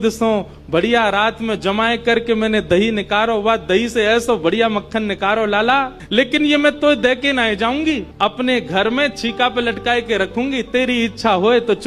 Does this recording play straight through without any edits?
no; 1 cut; at 6.9 s

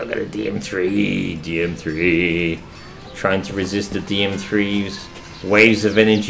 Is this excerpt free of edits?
yes; 0 cuts

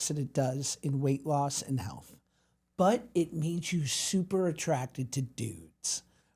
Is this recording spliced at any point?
no; 0 cuts

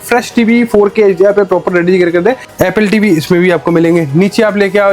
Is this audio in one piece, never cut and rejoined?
no; 1 cut; at 2.5 s

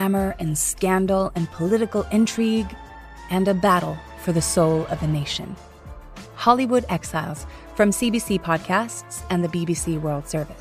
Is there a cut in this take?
no; 0 cuts

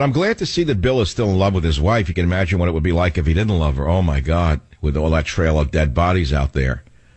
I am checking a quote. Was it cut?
no; 0 cuts

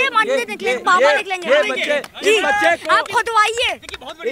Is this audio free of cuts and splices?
yes; 0 cuts

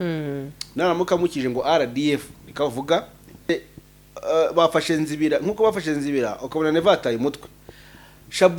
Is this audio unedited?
no; 1 cut; at 3.5 s

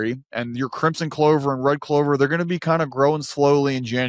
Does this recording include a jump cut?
no; 0 cuts

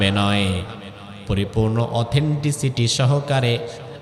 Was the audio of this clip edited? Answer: no; 0 cuts

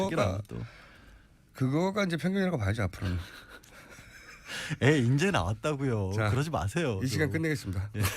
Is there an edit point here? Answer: yes; 1 cut; at 1.2 s

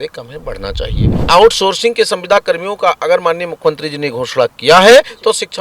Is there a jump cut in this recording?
yes; 1 cut; at 1.2 s

